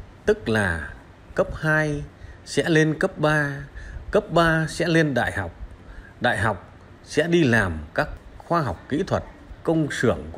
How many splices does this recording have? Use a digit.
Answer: 2